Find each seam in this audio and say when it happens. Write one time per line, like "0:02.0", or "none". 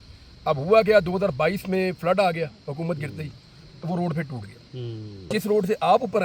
0:05.3